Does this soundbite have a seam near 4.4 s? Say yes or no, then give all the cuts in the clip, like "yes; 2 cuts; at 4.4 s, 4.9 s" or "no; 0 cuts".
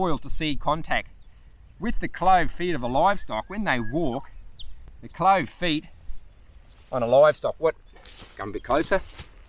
no; 0 cuts